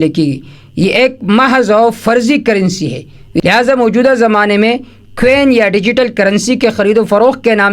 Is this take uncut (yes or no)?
no